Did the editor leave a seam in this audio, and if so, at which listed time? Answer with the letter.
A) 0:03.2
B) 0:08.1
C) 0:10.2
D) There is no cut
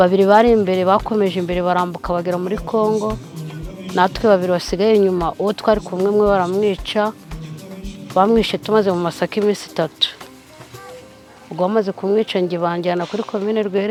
D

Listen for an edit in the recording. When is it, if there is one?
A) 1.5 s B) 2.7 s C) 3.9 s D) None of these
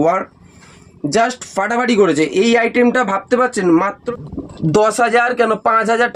C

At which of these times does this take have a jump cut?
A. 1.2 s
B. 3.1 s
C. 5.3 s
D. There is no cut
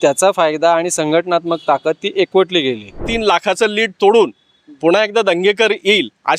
B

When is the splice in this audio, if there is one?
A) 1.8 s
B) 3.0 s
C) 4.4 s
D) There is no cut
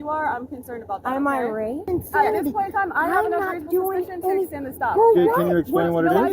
A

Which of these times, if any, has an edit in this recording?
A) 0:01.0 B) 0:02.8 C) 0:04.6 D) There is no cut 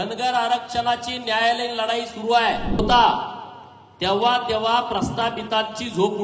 B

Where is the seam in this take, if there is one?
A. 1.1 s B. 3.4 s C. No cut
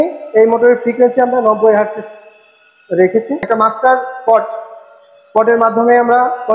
B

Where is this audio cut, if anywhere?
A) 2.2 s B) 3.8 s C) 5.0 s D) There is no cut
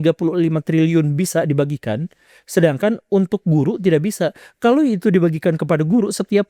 D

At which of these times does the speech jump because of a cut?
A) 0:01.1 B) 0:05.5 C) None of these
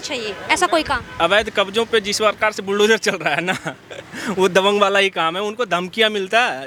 C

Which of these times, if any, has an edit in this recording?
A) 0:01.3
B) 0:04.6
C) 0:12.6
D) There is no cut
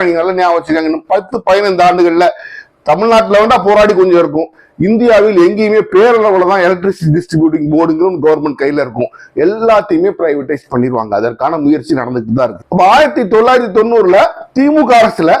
C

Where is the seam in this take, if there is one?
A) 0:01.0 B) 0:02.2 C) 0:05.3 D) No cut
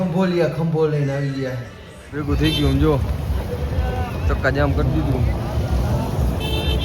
B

